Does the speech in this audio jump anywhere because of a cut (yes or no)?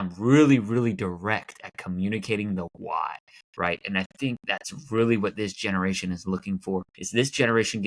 yes